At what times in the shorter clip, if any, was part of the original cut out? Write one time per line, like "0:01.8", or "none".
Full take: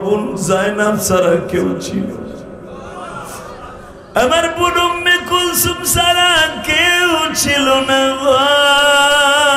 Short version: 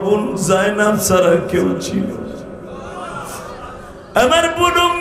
none